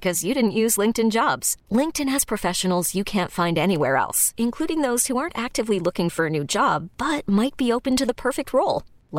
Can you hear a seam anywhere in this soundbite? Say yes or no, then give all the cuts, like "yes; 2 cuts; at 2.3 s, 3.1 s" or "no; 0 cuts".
no; 0 cuts